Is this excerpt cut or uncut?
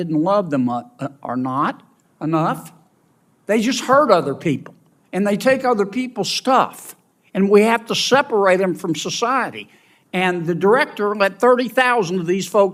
uncut